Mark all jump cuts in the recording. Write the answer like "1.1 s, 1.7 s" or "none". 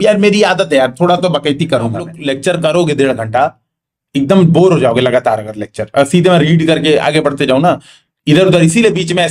2.1 s